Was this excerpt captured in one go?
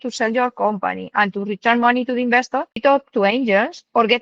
no; 1 cut; at 2.8 s

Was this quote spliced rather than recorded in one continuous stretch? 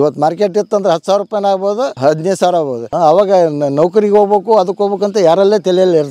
yes; 2 cuts; at 1.9 s, 2.9 s

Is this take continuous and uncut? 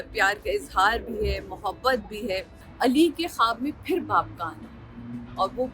no; 1 cut; at 2.6 s

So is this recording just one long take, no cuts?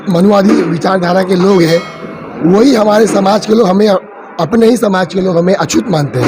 yes; 0 cuts

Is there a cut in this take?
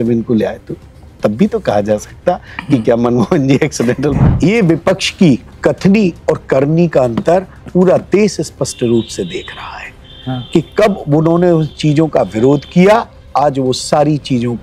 yes; 1 cut; at 4.2 s

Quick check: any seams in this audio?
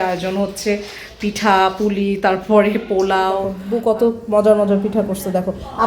yes; 1 cut; at 3.6 s

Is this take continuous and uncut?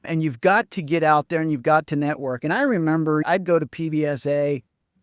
no; 1 cut; at 3.2 s

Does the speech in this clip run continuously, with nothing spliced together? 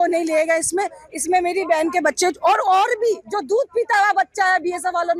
yes; 0 cuts

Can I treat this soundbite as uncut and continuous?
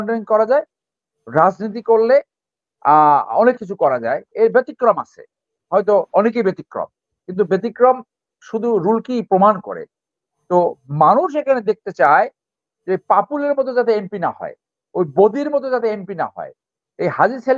yes; 0 cuts

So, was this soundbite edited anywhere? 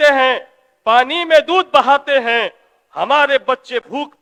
no; 0 cuts

